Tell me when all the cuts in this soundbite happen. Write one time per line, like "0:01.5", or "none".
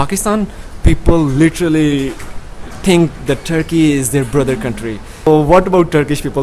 0:05.3